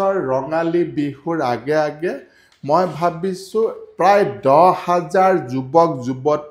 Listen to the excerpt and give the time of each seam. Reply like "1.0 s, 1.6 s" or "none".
none